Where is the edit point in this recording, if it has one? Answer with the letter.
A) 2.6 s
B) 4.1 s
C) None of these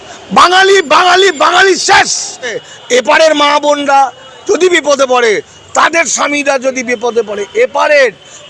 A